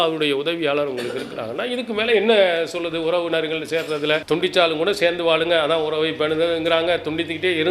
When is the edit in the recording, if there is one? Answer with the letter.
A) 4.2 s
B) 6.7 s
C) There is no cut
A